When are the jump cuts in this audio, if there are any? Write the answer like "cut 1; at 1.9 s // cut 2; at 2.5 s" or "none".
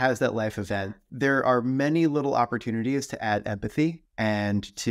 cut 1; at 1.0 s // cut 2; at 4.0 s

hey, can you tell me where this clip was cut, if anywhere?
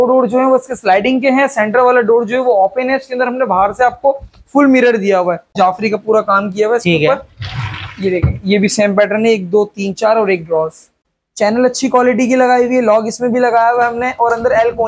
cut 1; at 5.5 s // cut 2; at 11.0 s

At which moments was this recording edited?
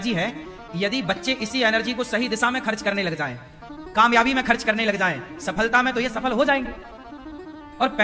none

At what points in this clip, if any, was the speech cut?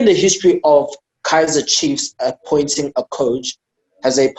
none

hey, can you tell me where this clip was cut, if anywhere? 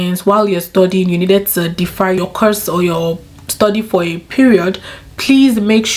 none

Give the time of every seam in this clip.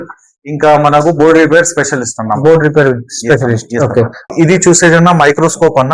cut 1; at 4.3 s

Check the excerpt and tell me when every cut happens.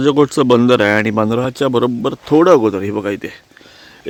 none

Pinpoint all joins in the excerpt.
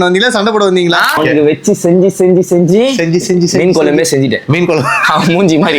cut 1; at 1.2 s

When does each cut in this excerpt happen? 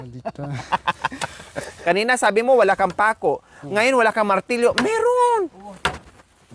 cut 1; at 1.8 s

